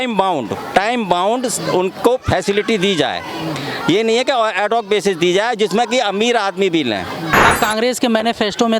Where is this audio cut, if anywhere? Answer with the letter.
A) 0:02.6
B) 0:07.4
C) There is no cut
B